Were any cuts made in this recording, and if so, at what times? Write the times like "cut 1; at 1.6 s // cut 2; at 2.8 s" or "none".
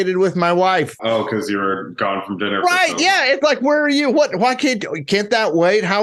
cut 1; at 1.0 s